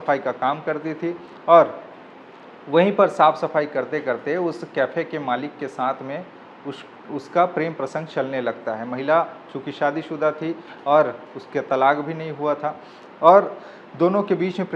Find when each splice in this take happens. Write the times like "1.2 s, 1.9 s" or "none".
none